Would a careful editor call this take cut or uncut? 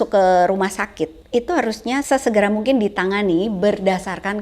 cut